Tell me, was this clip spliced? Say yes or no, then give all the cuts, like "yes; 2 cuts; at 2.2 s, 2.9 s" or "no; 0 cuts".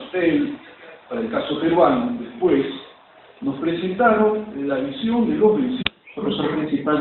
no; 0 cuts